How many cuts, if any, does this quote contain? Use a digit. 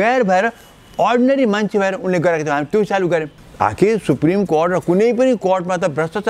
1